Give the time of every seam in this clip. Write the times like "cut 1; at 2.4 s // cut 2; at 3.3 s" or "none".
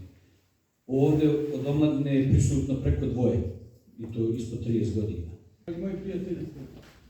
cut 1; at 5.5 s